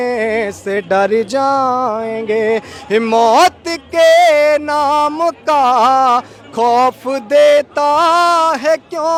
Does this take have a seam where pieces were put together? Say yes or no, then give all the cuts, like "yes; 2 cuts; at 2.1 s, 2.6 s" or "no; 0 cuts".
no; 0 cuts